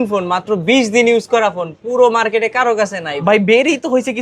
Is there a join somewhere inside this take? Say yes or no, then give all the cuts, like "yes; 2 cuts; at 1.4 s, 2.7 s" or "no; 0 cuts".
no; 0 cuts